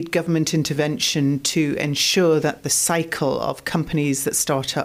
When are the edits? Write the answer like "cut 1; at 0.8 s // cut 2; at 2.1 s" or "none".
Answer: none